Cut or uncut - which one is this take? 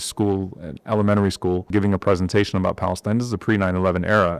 cut